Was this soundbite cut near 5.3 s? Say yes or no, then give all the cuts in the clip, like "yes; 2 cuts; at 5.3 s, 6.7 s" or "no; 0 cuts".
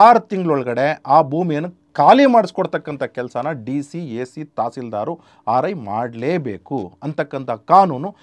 no; 1 cut; at 1.8 s